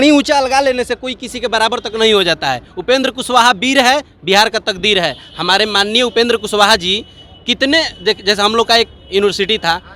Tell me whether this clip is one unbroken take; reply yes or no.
yes